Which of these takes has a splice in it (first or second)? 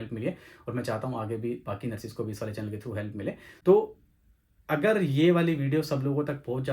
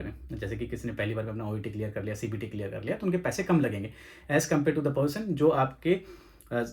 first